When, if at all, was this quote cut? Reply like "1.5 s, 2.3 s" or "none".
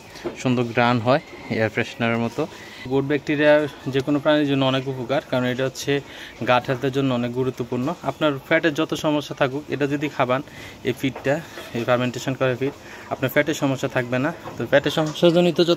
2.9 s